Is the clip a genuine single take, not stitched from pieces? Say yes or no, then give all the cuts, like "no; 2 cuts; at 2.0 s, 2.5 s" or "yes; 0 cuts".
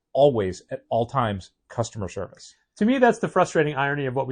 yes; 0 cuts